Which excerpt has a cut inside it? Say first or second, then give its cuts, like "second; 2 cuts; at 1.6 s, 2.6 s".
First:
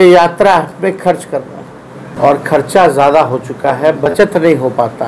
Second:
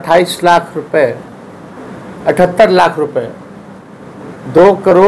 first; 1 cut; at 2.1 s